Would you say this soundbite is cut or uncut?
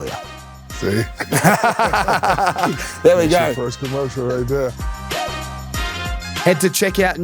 cut